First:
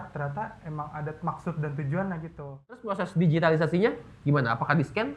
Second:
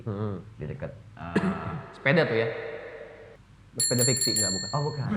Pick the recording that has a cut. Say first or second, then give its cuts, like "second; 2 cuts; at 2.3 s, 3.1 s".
first; 1 cut; at 2.8 s